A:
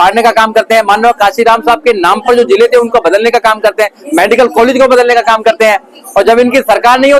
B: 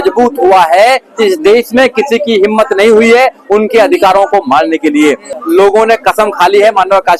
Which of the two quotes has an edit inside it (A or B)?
B